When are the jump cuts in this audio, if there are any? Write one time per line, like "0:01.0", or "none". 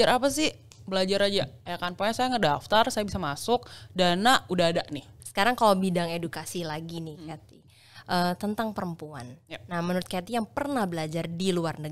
0:05.2